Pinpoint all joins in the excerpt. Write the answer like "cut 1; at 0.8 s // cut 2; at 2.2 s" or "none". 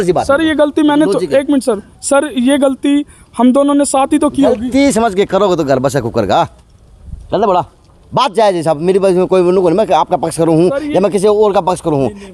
none